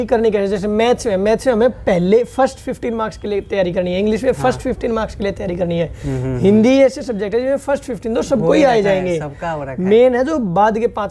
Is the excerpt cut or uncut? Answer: uncut